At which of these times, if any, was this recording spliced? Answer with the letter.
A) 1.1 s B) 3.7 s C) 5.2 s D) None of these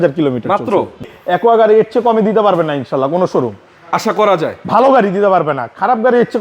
A